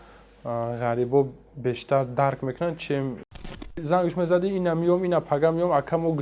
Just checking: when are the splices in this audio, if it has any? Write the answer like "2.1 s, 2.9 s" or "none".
3.8 s